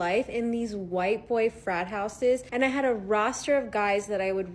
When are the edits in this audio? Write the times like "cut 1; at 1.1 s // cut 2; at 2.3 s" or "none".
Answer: cut 1; at 2.5 s

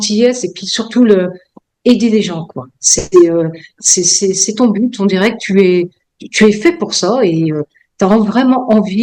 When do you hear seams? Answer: none

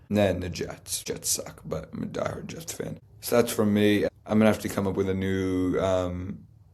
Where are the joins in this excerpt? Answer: cut 1; at 0.9 s // cut 2; at 3.1 s // cut 3; at 4.1 s

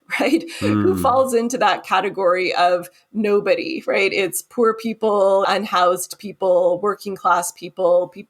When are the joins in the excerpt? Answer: cut 1; at 5.4 s

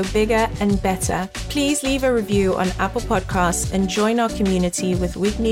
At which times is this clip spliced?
cut 1; at 1.3 s

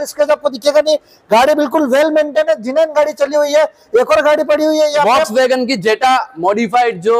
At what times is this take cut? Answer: none

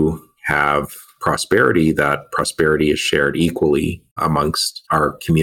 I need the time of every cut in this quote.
cut 1; at 4.3 s

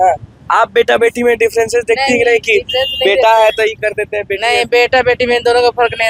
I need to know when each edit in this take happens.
none

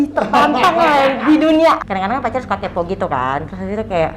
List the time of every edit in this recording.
cut 1; at 1.8 s

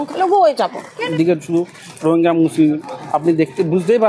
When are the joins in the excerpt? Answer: cut 1; at 1.0 s

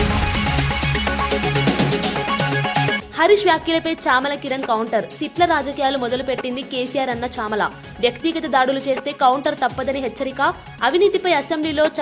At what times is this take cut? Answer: none

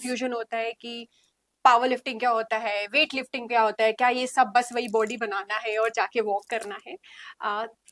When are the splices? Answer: none

